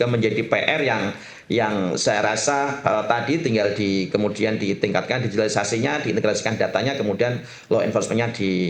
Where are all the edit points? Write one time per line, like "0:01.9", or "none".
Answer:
none